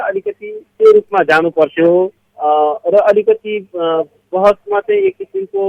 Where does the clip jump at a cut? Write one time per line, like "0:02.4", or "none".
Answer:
none